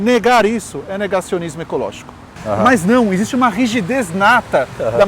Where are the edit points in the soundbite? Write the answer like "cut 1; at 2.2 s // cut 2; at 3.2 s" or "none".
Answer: cut 1; at 2.4 s